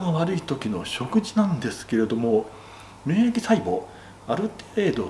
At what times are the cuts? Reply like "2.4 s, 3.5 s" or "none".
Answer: none

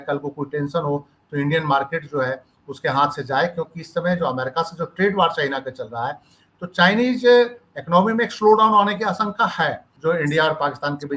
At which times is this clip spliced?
9.9 s

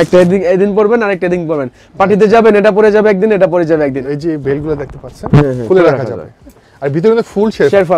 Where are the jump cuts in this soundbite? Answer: none

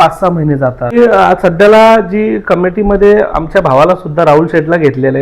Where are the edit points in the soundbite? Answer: 0.9 s

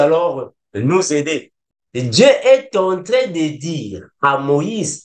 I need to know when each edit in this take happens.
1.6 s

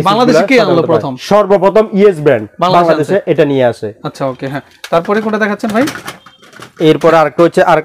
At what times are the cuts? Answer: none

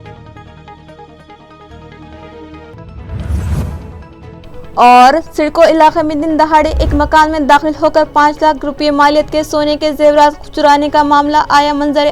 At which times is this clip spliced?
1.0 s

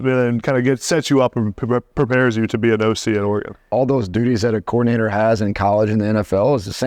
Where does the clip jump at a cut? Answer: 3.7 s

